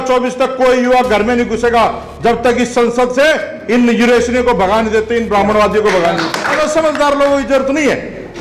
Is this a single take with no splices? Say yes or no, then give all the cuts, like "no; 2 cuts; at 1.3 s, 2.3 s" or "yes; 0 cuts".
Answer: no; 1 cut; at 6.6 s